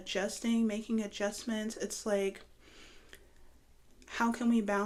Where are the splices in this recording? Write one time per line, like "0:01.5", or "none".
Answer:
none

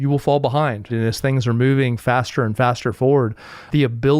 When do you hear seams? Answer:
0:00.9

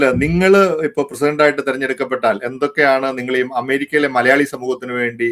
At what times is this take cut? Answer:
none

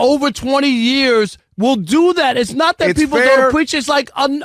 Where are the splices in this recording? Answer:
0:01.4

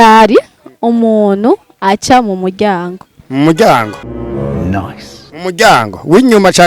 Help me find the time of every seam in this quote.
0:04.0
0:05.4

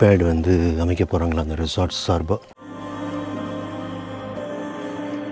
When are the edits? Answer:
0:02.5

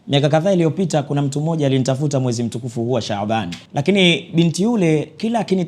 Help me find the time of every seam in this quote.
0:03.6

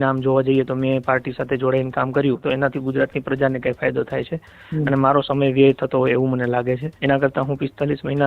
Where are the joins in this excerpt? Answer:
0:02.4
0:06.9

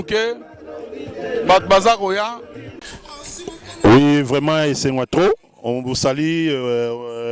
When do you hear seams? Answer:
0:03.0

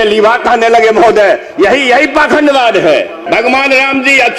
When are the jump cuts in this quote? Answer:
0:03.2

